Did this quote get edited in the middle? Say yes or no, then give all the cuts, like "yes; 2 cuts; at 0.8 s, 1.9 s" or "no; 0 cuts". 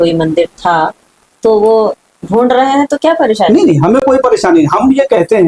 no; 0 cuts